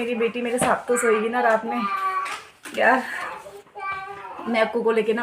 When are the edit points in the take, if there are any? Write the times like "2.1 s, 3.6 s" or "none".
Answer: none